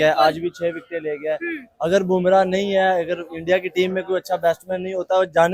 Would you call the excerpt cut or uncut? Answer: uncut